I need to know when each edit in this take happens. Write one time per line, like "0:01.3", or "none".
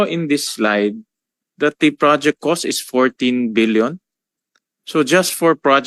none